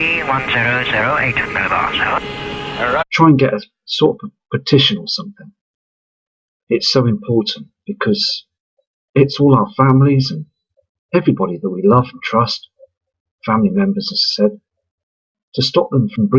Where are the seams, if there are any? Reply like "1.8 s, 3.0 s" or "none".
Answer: none